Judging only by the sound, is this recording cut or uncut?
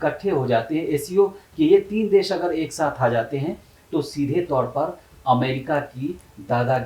uncut